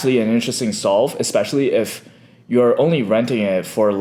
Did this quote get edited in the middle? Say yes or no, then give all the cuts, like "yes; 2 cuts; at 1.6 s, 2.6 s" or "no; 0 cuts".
no; 0 cuts